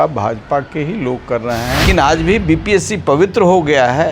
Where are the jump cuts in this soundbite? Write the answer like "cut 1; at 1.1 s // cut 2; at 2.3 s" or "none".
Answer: cut 1; at 1.8 s